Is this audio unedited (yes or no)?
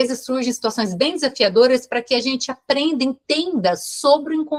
yes